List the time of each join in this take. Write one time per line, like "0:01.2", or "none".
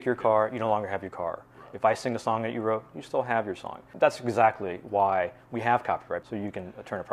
0:03.8
0:06.2